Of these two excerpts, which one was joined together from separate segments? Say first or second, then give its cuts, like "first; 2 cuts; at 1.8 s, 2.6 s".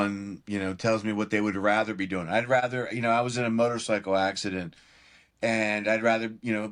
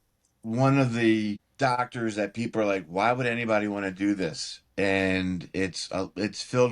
second; 1 cut; at 1.5 s